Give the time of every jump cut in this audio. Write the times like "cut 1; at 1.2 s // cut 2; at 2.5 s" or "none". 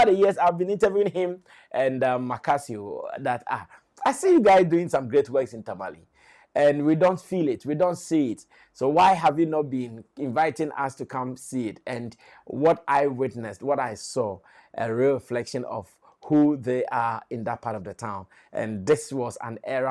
none